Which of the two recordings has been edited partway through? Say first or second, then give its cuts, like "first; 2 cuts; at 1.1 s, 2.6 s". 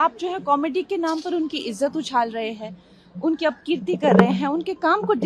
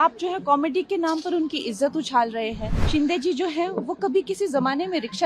second; 1 cut; at 2.8 s